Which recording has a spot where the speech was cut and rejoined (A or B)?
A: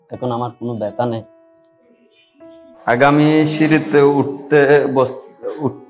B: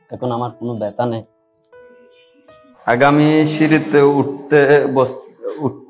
B